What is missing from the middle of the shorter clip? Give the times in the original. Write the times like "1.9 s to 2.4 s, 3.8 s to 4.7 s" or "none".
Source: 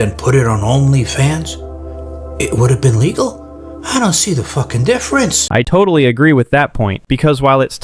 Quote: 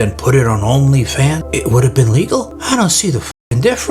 1.4 s to 2.3 s, 3.4 s to 3.8 s